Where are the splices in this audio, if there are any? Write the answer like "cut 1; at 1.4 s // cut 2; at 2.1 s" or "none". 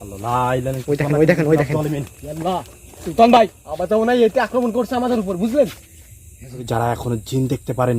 cut 1; at 6.6 s